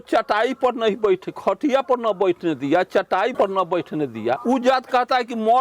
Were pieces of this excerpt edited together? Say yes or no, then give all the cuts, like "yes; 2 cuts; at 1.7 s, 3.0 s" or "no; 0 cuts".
yes; 2 cuts; at 3.3 s, 4.4 s